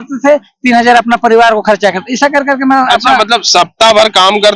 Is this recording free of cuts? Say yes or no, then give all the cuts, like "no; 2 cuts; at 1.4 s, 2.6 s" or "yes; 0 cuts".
yes; 0 cuts